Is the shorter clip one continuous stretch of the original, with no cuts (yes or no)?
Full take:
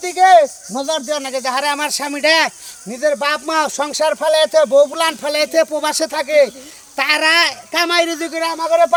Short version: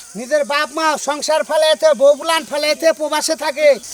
yes